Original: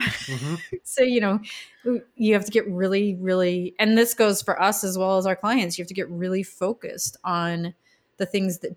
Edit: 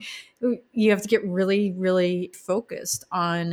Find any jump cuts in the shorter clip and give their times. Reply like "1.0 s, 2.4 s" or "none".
2.3 s